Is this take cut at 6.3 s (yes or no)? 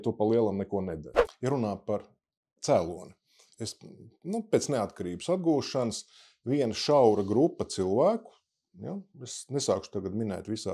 no